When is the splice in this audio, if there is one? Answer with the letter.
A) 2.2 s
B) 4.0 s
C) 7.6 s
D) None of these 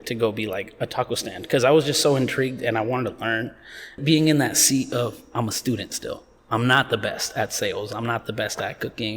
B